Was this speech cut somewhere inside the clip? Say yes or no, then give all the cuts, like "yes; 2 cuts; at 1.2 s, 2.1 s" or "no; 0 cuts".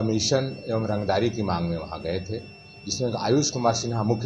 no; 0 cuts